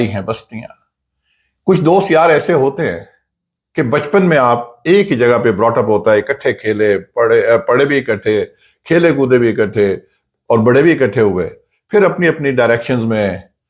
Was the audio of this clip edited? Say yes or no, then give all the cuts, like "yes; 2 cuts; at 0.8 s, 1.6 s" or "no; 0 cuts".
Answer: no; 0 cuts